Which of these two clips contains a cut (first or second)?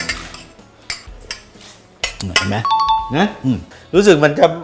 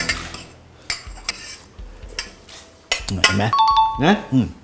first